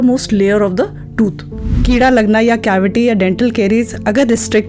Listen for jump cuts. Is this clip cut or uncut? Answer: cut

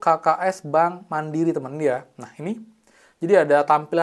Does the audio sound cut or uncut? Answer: uncut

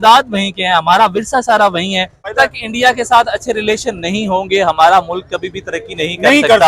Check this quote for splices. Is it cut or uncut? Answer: cut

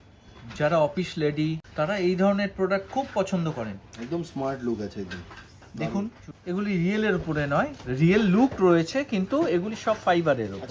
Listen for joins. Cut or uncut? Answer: cut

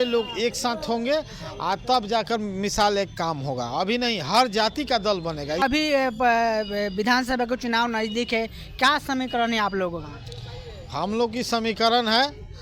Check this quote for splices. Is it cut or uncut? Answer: cut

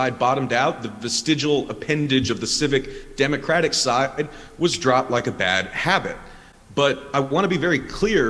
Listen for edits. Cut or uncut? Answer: uncut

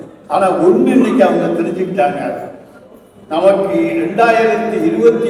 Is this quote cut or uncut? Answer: uncut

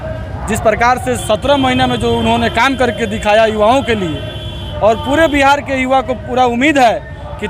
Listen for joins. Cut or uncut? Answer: uncut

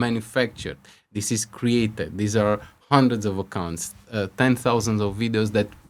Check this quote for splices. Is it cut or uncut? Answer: uncut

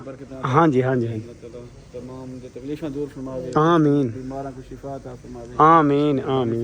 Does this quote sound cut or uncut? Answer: uncut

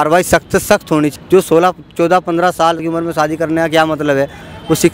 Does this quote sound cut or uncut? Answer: cut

